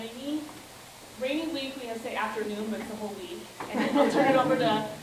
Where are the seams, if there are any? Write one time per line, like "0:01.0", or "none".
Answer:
none